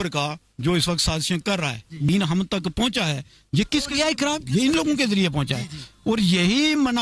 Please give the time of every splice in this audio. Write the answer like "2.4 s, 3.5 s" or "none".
2.1 s

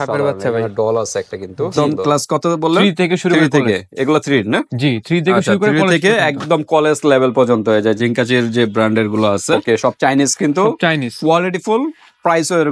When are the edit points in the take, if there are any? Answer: 1.7 s, 9.6 s

